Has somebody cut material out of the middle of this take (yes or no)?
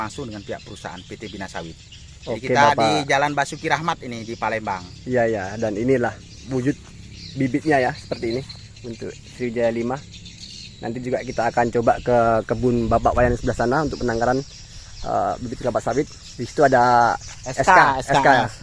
no